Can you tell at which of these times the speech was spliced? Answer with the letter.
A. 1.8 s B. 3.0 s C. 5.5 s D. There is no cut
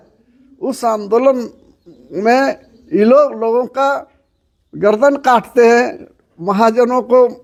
D